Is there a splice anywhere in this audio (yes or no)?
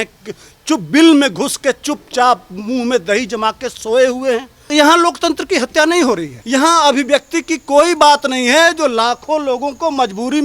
yes